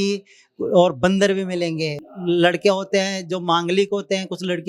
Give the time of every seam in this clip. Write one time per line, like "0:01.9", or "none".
0:02.0